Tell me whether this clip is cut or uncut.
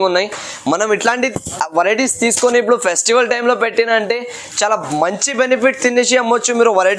uncut